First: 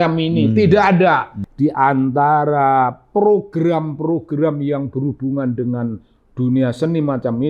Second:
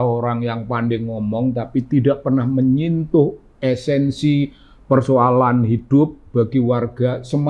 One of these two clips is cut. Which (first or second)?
first